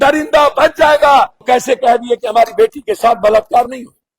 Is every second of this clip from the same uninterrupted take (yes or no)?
no